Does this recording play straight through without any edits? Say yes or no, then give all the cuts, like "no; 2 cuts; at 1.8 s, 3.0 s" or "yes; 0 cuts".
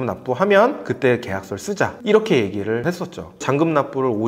yes; 0 cuts